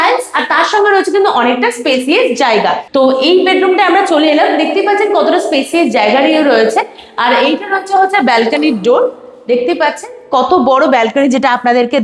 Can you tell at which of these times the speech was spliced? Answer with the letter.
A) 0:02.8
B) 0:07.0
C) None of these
A